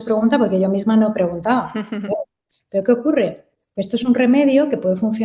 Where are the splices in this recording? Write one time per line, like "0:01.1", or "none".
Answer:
0:02.4

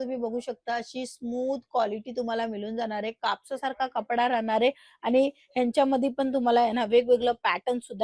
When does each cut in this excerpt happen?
none

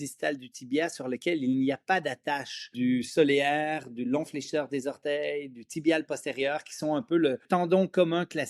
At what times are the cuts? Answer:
0:02.7
0:07.4

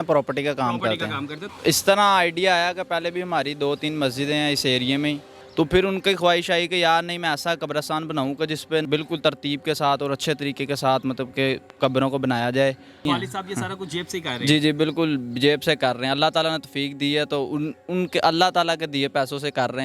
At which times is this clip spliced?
0:01.4
0:05.3
0:08.8
0:13.1

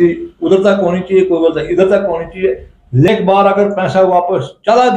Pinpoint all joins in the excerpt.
0:03.1

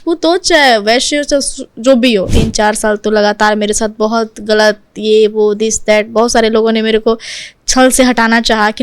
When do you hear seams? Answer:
0:02.3

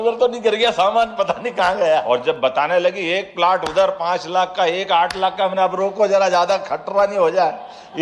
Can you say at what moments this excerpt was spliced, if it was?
0:02.0

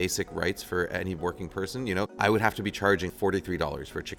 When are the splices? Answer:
0:02.1
0:03.1

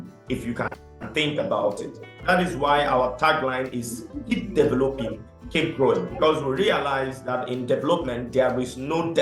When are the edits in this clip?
0:02.2

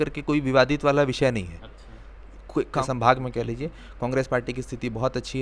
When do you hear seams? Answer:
0:02.9

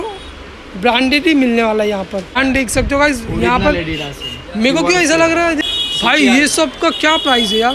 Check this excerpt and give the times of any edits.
0:02.4
0:05.6

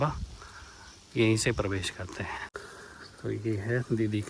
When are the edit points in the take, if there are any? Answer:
0:02.5

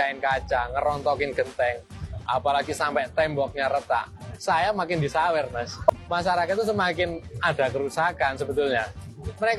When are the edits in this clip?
0:05.9

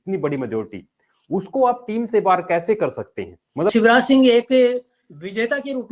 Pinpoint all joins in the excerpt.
0:03.7

